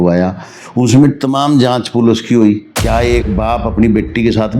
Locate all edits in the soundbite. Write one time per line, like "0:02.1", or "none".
0:03.3